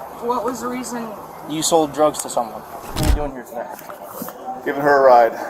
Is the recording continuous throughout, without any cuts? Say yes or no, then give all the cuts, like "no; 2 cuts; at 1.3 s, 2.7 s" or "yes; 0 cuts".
no; 1 cut; at 3.0 s